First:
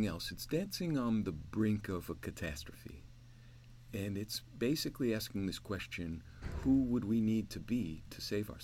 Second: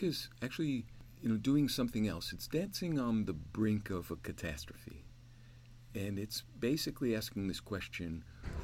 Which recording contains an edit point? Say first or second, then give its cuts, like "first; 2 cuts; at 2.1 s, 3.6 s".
second; 1 cut; at 1.0 s